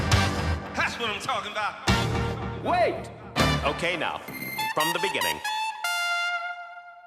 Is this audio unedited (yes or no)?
yes